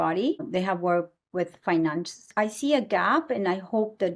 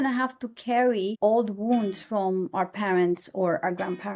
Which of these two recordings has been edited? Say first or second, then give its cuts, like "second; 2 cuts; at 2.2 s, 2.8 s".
first; 1 cut; at 2.3 s